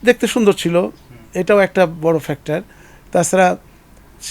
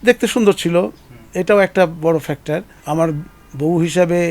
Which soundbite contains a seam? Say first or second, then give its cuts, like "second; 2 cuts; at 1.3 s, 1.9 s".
second; 1 cut; at 2.7 s